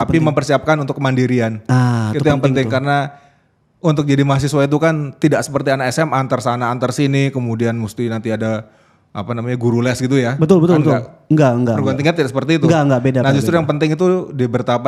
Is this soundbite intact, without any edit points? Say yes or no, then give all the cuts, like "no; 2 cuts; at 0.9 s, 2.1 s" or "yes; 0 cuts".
yes; 0 cuts